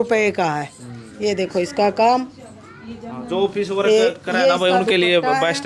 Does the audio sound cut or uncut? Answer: uncut